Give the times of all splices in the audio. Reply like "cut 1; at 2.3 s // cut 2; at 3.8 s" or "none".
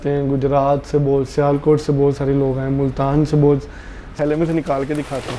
cut 1; at 4.1 s